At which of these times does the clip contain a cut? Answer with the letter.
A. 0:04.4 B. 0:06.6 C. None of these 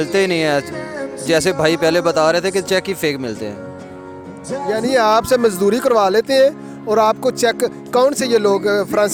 C